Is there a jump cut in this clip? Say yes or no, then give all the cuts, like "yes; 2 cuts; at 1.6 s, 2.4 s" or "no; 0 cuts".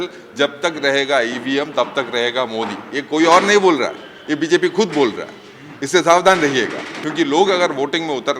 yes; 1 cut; at 7.0 s